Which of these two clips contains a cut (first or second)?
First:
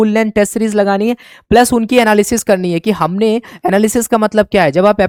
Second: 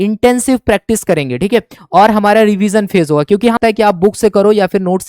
second